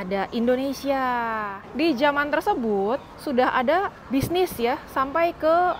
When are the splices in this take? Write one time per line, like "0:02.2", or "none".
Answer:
0:01.6
0:03.1
0:04.0